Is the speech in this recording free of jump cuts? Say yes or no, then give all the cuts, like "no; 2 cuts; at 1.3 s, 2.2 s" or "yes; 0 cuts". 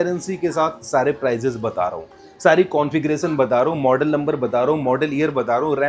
yes; 0 cuts